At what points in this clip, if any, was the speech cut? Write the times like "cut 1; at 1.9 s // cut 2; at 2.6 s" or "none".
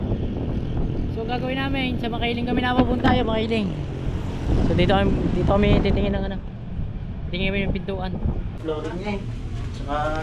cut 1; at 8.6 s